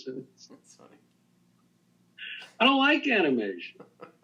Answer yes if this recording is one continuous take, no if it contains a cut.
yes